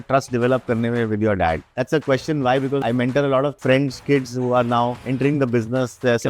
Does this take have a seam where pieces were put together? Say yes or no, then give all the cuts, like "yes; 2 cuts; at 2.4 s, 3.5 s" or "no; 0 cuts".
yes; 4 cuts; at 1.7 s, 2.8 s, 3.6 s, 5.0 s